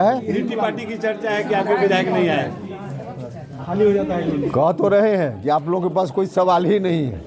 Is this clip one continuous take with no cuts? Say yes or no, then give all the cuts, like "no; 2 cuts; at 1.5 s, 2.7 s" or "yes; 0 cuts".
yes; 0 cuts